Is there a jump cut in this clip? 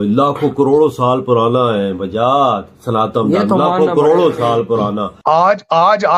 yes; 1 cut; at 5.1 s

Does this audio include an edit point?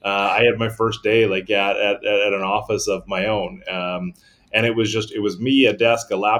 no; 0 cuts

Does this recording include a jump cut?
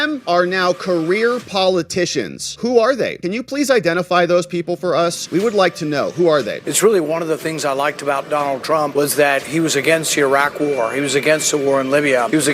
yes; 1 cut; at 6.6 s

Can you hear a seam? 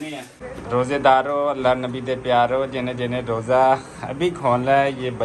yes; 1 cut; at 0.9 s

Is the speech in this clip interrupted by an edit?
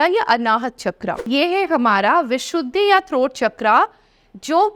yes; 1 cut; at 1.3 s

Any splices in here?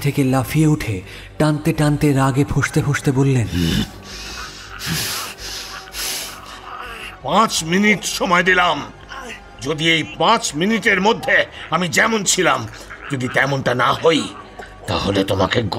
yes; 1 cut; at 3.5 s

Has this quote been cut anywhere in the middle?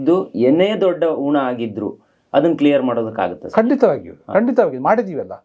no; 0 cuts

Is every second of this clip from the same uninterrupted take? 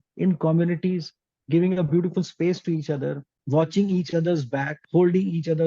no; 2 cuts; at 3.3 s, 4.8 s

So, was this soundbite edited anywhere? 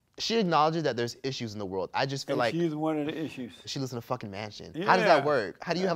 yes; 1 cut; at 3.6 s

